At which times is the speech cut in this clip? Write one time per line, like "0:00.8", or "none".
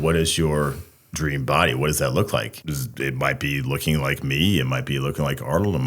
0:02.6